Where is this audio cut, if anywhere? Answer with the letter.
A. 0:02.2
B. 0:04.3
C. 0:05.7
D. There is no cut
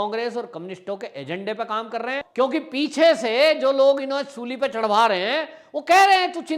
A